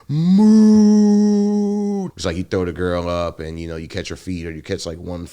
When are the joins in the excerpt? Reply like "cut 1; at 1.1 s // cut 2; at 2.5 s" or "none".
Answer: cut 1; at 2.1 s